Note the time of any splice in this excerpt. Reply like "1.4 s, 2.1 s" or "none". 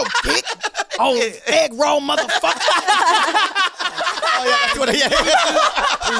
4.1 s